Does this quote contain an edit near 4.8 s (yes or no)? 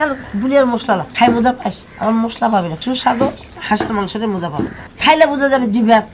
yes